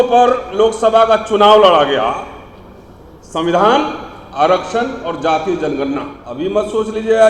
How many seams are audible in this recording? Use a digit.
1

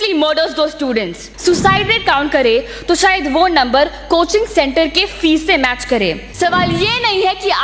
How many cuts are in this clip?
2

